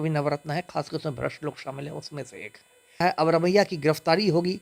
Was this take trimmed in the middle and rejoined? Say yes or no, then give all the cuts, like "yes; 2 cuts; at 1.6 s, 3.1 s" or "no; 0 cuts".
yes; 1 cut; at 3.0 s